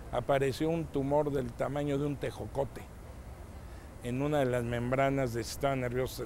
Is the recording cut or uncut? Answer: uncut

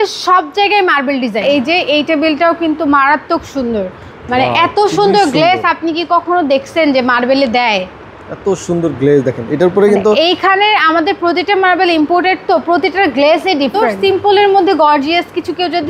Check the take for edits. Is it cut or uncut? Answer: cut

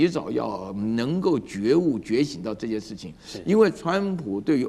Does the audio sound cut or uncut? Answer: uncut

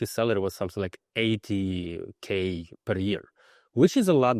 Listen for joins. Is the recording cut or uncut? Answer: uncut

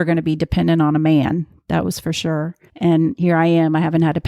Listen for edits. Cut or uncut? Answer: cut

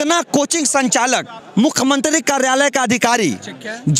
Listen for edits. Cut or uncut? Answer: cut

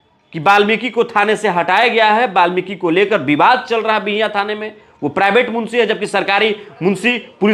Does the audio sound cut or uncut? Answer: uncut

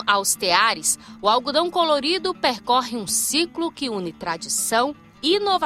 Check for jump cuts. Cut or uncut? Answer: uncut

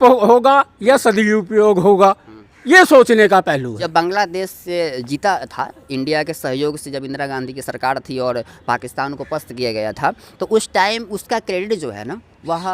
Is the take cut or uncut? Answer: cut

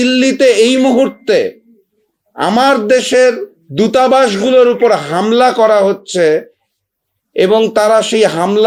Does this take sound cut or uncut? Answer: uncut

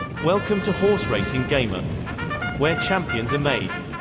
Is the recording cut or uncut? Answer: uncut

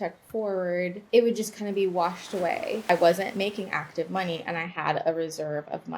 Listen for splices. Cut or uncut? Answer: cut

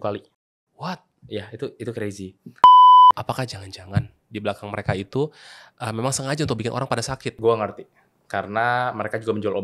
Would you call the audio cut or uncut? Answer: cut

